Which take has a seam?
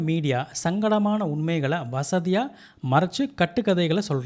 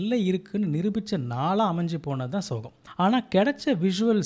second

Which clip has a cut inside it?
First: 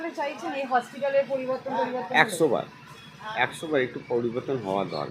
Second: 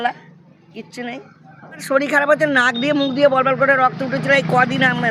second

